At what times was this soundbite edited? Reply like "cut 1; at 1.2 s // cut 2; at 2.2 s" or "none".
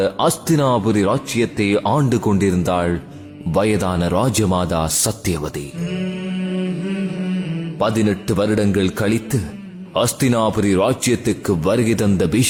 none